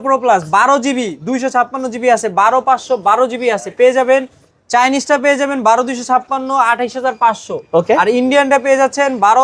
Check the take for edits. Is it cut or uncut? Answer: uncut